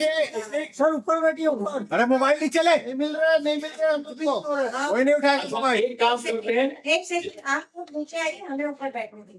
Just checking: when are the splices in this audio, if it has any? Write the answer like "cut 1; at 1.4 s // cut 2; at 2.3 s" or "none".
none